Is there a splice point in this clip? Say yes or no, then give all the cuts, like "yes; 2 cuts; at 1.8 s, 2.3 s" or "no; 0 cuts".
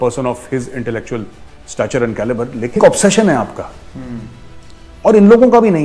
yes; 1 cut; at 2.8 s